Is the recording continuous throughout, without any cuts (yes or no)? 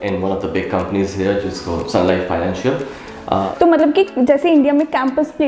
no